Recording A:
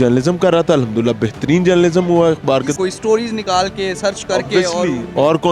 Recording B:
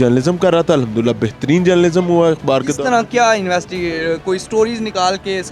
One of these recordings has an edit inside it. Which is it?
A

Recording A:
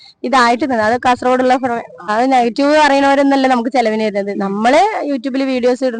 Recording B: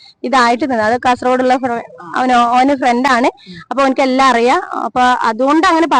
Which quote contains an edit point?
A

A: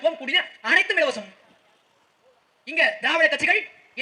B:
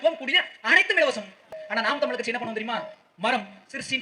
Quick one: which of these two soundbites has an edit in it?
B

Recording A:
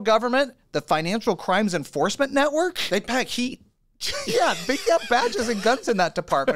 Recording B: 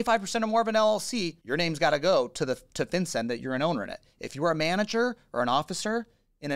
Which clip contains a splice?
B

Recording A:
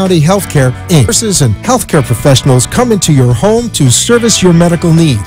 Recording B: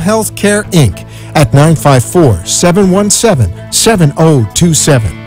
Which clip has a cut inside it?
A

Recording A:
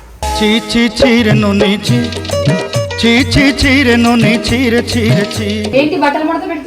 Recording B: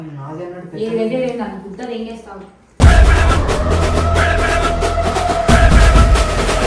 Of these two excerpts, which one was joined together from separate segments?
A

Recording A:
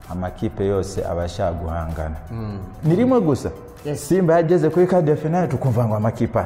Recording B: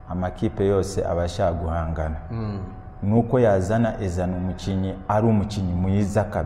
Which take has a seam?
A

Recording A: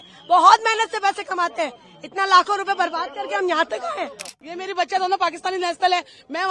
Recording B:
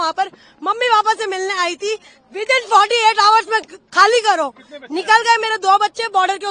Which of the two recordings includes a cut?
A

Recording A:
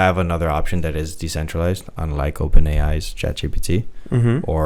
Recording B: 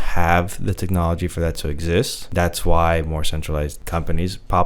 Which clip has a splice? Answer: B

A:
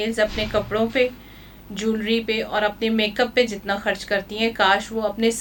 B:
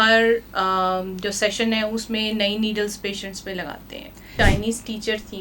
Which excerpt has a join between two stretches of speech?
B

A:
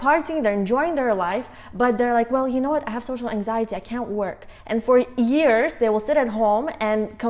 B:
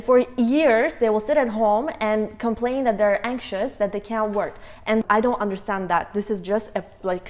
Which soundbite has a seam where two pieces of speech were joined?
B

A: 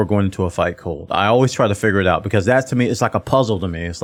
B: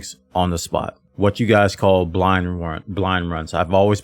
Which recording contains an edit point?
B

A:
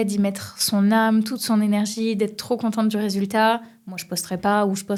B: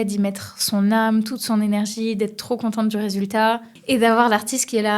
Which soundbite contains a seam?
B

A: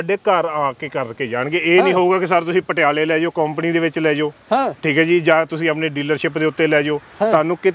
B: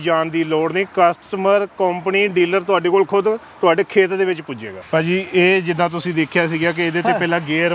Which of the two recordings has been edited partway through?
B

